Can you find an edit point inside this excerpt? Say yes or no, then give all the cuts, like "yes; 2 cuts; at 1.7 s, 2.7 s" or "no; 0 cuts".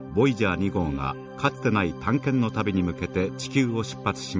no; 0 cuts